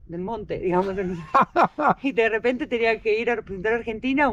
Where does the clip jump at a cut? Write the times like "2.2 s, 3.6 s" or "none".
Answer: none